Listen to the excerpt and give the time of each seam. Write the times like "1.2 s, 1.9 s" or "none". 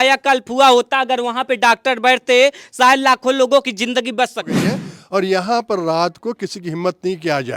4.7 s